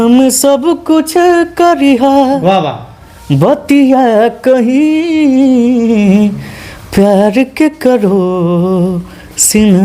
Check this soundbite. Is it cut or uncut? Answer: uncut